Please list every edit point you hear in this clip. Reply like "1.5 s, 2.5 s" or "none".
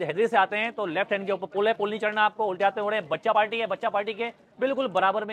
none